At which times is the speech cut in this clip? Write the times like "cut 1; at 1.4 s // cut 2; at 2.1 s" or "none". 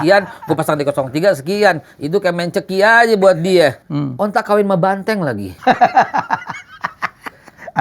cut 1; at 3.8 s // cut 2; at 5.5 s